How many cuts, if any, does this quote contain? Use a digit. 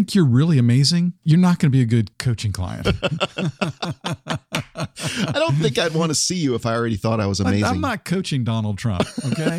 2